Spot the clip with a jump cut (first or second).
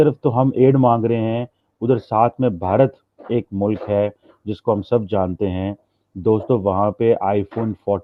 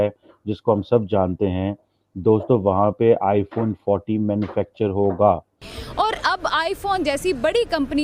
second